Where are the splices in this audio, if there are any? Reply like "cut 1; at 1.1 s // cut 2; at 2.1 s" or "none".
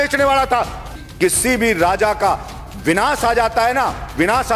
cut 1; at 1.0 s